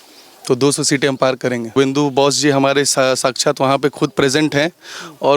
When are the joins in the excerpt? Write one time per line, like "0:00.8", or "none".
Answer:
0:01.7